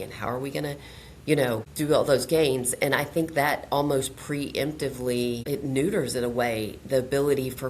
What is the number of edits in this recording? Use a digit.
2